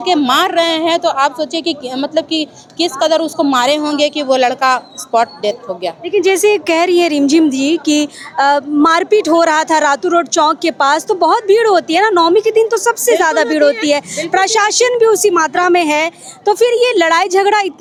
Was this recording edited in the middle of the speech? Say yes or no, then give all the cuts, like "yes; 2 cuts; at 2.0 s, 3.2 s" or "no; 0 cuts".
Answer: no; 0 cuts